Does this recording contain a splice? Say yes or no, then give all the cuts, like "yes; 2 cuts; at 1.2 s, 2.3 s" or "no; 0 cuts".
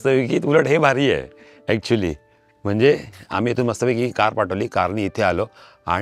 no; 0 cuts